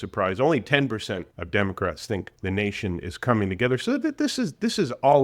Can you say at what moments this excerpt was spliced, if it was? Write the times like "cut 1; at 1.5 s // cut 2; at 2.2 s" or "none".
cut 1; at 1.3 s // cut 2; at 2.3 s